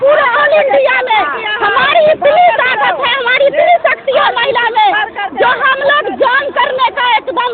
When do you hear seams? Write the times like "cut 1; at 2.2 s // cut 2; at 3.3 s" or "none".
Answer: none